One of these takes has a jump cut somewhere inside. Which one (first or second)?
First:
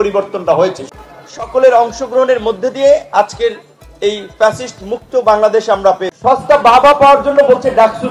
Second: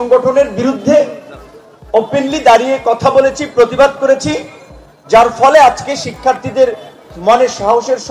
first